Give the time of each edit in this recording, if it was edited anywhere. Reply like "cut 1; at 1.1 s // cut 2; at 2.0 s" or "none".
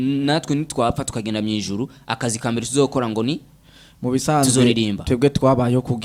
none